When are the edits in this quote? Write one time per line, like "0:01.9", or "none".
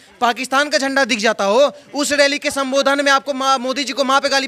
none